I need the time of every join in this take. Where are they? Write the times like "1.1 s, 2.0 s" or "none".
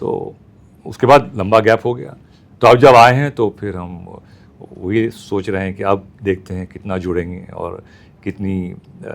none